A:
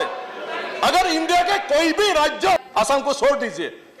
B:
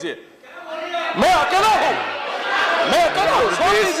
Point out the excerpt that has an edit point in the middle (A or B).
A